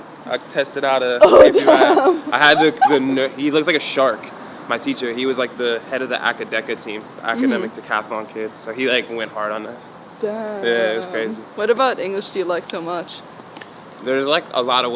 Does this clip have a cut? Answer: no; 0 cuts

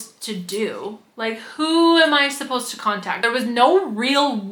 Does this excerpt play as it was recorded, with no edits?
no; 1 cut; at 3.2 s

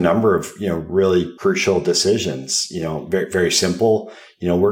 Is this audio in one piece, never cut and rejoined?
no; 1 cut; at 1.3 s

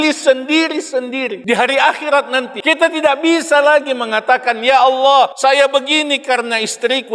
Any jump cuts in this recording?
yes; 3 cuts; at 1.4 s, 2.5 s, 5.3 s

